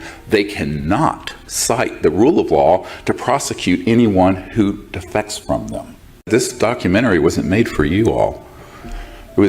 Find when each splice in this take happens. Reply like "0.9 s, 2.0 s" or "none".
6.3 s